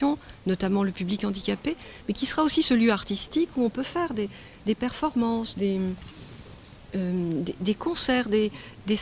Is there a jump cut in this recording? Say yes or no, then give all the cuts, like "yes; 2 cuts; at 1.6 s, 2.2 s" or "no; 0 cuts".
yes; 1 cut; at 4.4 s